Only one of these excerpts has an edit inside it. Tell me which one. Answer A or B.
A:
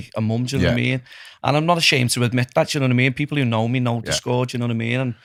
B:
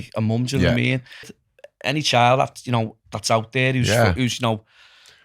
B